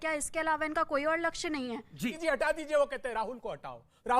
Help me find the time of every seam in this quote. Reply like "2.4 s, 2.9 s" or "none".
2.2 s